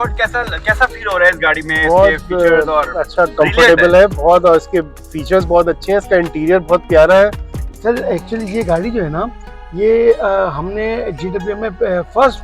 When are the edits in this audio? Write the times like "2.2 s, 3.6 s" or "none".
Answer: 7.6 s